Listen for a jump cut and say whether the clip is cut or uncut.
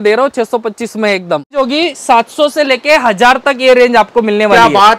cut